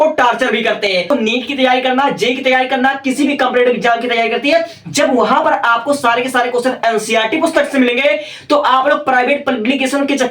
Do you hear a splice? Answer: yes; 1 cut; at 1.1 s

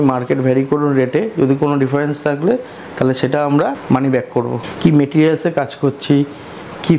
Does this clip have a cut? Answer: yes; 2 cuts; at 3.8 s, 4.6 s

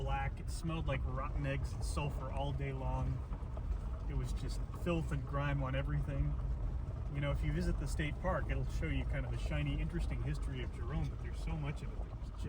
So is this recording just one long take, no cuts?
yes; 0 cuts

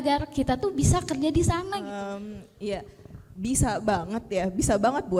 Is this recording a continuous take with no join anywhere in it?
no; 1 cut; at 1.8 s

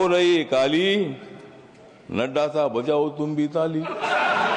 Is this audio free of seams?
yes; 0 cuts

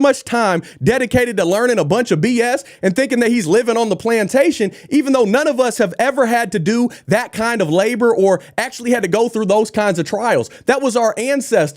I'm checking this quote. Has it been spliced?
no; 0 cuts

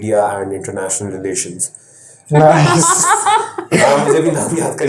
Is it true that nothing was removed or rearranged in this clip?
yes; 0 cuts

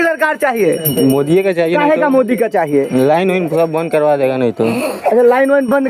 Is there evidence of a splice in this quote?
no; 0 cuts

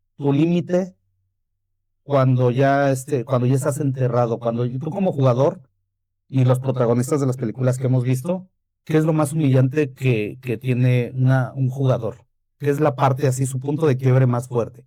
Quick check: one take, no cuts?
yes; 0 cuts

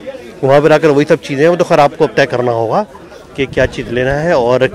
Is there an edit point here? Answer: no; 0 cuts

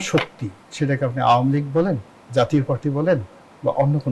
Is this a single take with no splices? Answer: no; 1 cut; at 2.1 s

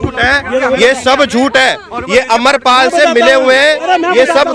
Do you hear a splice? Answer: no; 0 cuts

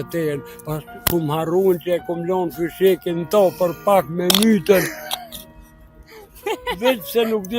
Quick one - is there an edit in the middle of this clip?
no; 0 cuts

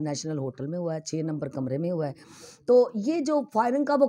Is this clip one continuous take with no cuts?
yes; 0 cuts

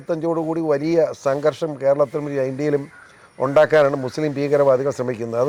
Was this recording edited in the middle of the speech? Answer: no; 0 cuts

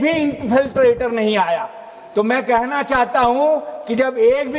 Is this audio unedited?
yes; 0 cuts

